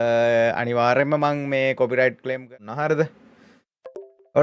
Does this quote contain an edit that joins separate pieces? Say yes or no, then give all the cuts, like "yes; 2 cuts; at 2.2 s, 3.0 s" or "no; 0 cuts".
yes; 1 cut; at 2.5 s